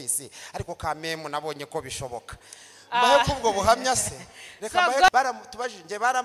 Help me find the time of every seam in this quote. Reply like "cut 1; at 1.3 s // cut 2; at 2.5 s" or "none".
cut 1; at 5.1 s